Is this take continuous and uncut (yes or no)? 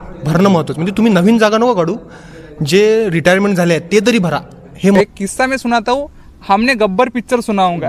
no